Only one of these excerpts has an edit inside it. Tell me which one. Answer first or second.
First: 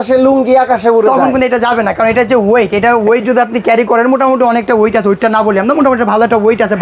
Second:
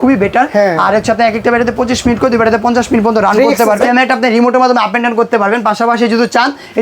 second